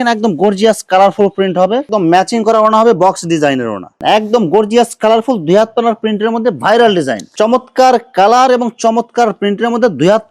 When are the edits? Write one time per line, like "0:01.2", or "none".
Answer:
0:01.9
0:03.9
0:07.3